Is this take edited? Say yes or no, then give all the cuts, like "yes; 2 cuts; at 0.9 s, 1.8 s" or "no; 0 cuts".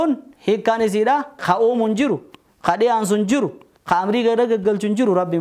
yes; 1 cut; at 1.4 s